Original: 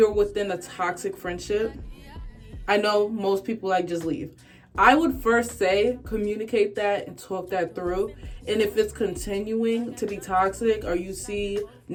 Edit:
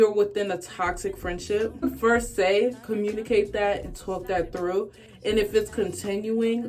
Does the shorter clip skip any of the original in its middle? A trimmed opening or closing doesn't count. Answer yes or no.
yes